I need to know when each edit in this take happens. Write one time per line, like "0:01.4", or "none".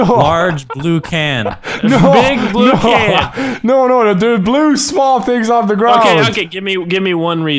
none